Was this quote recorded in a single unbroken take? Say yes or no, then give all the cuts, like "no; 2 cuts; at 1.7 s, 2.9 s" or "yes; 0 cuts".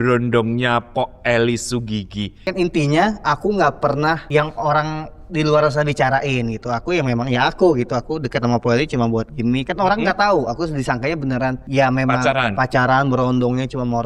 no; 3 cuts; at 2.5 s, 4.2 s, 11.6 s